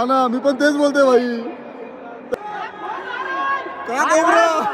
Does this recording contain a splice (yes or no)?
yes